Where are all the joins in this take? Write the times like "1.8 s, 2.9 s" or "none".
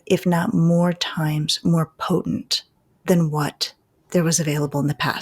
none